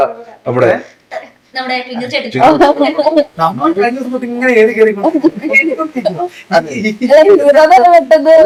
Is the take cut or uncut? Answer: uncut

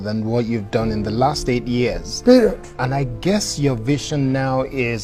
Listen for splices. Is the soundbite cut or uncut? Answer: uncut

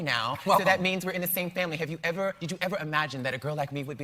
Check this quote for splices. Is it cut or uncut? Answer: uncut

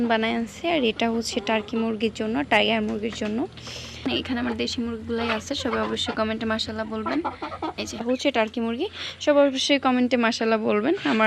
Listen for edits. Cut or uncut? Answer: cut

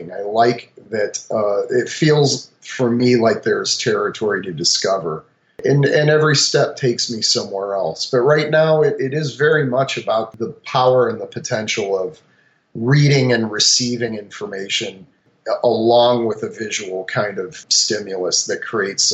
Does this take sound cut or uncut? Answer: cut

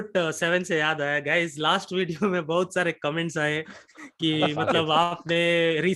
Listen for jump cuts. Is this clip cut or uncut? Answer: uncut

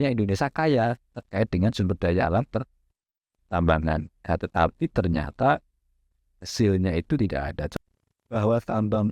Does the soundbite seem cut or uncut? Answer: cut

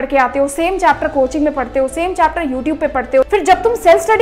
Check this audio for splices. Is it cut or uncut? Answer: cut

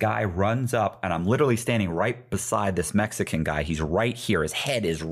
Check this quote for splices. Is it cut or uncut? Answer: uncut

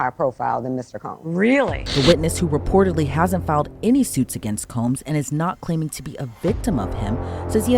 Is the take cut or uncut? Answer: cut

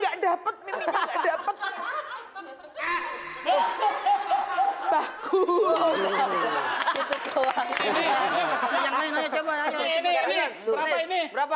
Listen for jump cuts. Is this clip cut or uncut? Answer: cut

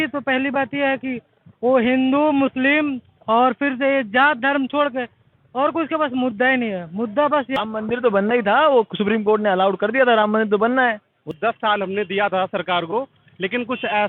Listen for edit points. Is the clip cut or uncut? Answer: cut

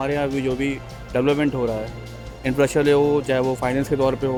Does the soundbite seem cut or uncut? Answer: uncut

